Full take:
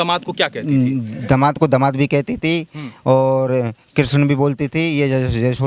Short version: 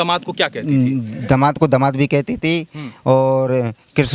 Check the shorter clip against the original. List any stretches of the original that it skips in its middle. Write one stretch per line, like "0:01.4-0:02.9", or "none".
none

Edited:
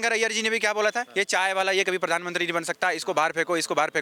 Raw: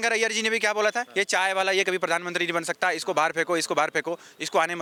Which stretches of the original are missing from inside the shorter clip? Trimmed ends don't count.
none

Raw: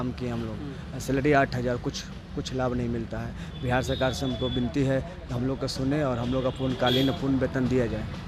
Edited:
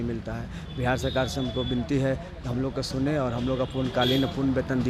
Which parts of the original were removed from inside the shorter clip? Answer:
none

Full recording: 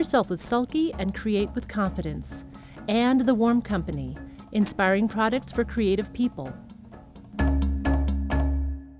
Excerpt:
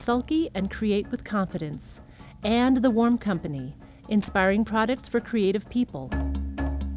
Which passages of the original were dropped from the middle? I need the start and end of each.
0:06.4-0:07.3

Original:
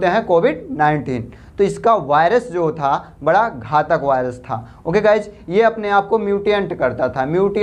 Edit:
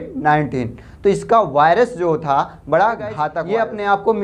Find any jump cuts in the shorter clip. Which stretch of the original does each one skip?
0:03.9-0:05.4

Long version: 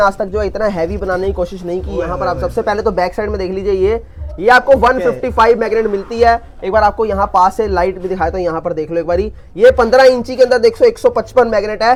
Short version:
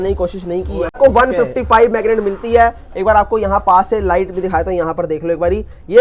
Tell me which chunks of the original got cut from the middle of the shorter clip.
0:02.1-0:04.6

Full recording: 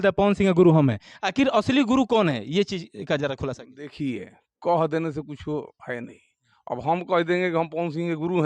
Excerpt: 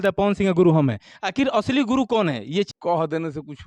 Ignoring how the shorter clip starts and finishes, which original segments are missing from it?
0:02.7-0:04.5

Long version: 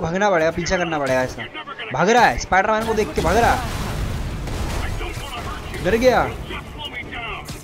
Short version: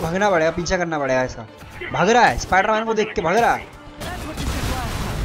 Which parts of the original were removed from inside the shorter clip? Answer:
none

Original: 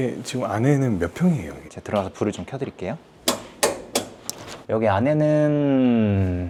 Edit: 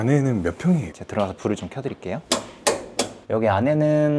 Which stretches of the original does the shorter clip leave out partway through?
0:01.5-0:01.7
0:03.0-0:03.2
0:04.1-0:04.6

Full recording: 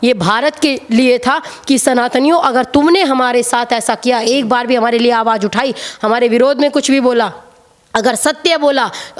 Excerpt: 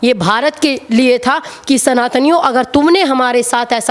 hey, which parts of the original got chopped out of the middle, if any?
none

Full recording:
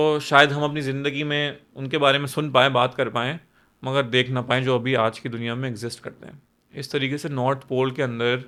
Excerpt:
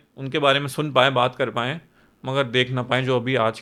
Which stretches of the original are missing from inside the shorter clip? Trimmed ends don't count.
none

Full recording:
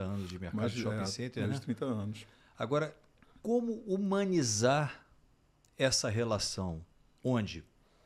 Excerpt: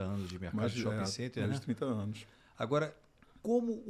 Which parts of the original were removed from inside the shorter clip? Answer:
none

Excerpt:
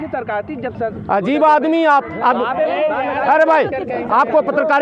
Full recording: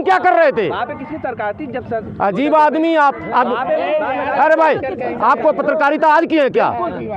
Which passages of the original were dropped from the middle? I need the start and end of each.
none

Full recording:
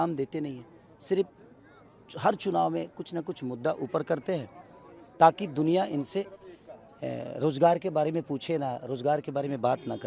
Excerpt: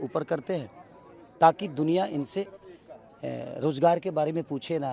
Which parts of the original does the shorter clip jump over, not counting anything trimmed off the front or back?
none

